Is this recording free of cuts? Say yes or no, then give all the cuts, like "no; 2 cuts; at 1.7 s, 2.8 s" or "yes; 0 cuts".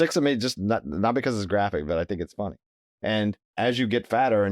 no; 1 cut; at 3.5 s